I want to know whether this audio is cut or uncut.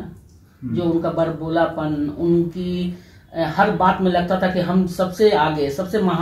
uncut